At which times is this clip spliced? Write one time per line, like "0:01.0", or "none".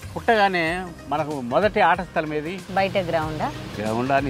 0:00.9
0:02.6